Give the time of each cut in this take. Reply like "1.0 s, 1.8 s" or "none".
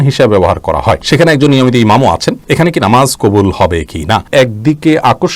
1.0 s, 2.4 s, 4.2 s